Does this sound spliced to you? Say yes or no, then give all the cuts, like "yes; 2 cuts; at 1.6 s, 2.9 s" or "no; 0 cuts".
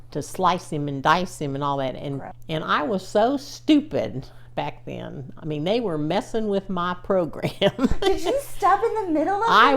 yes; 1 cut; at 2.2 s